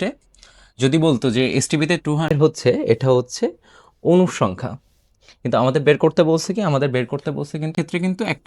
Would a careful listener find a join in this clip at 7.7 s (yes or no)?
yes